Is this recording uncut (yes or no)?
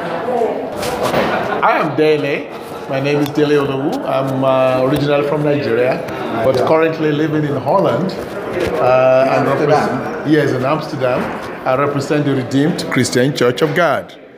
yes